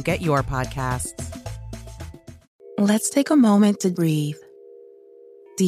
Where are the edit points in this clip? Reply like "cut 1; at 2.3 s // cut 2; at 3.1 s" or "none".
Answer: cut 1; at 2.5 s